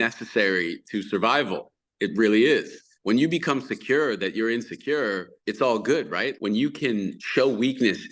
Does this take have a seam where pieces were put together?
yes; 4 cuts; at 2.9 s, 5.4 s, 6.4 s, 7.2 s

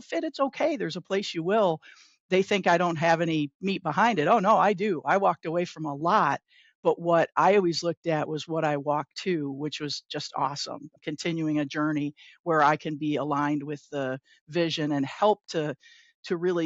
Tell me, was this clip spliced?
yes; 1 cut; at 11.0 s

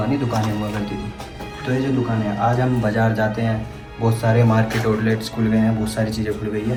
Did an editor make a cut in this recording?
no; 0 cuts

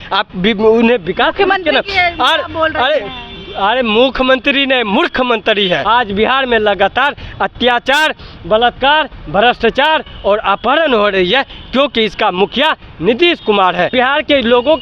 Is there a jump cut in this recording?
yes; 2 cuts; at 5.8 s, 13.9 s

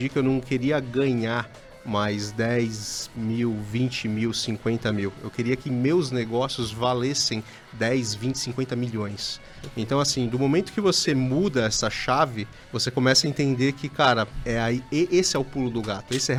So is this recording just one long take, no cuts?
yes; 0 cuts

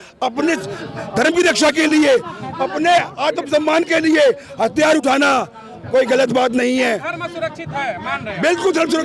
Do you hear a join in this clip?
no; 0 cuts

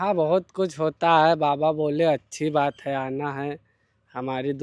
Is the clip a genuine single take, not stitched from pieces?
yes; 0 cuts

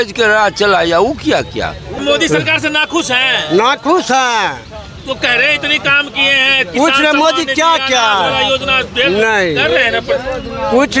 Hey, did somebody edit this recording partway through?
yes; 1 cut; at 2.0 s

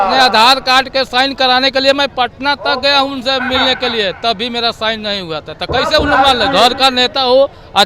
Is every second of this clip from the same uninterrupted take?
yes; 0 cuts

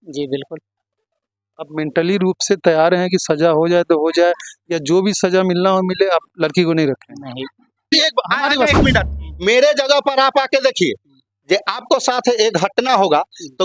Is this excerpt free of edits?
no; 1 cut; at 7.9 s

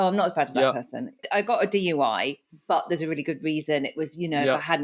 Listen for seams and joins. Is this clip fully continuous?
no; 1 cut; at 1.2 s

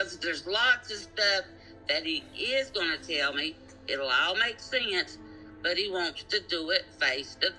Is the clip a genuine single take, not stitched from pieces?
yes; 0 cuts

